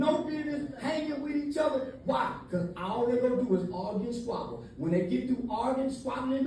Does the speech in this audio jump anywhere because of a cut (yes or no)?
no